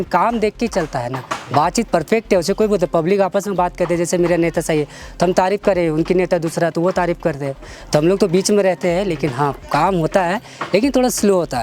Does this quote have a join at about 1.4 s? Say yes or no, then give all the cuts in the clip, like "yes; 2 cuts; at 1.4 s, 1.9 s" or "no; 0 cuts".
no; 0 cuts